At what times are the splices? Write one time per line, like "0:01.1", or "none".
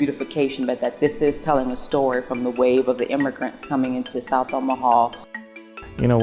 0:05.3